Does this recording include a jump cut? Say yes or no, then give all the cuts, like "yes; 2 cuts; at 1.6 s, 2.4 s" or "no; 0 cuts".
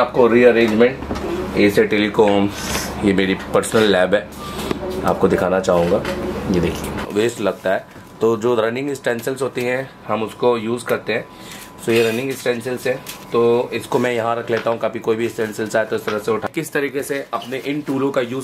yes; 2 cuts; at 7.0 s, 16.5 s